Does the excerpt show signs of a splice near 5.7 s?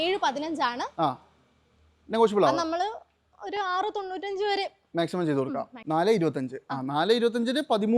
yes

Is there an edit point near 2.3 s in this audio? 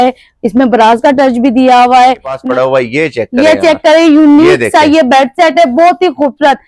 yes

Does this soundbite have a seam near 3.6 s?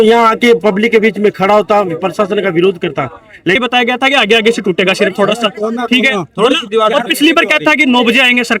yes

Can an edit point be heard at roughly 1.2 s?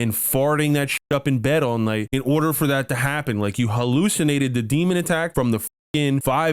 no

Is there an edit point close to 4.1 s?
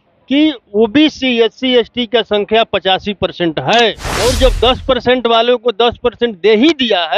yes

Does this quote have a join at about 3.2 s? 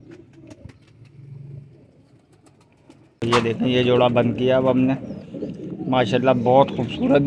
yes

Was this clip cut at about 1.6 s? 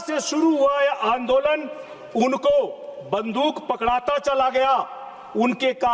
no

